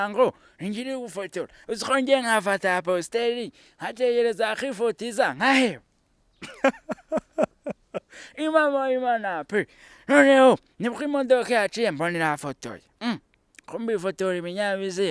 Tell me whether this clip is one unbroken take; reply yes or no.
yes